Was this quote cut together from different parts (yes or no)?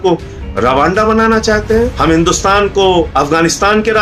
yes